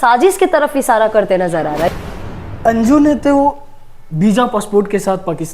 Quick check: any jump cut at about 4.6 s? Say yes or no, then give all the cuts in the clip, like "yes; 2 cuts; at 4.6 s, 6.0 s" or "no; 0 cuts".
no; 1 cut; at 1.9 s